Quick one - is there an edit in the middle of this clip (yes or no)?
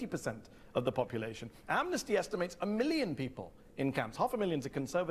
yes